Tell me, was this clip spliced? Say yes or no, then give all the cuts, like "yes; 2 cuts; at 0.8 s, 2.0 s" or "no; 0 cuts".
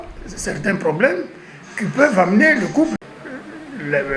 yes; 1 cut; at 3.0 s